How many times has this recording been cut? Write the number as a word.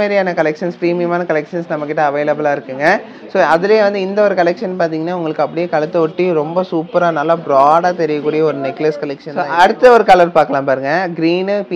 one